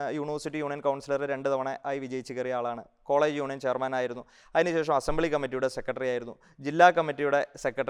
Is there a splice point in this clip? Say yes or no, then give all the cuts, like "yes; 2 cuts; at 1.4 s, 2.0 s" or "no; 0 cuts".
no; 0 cuts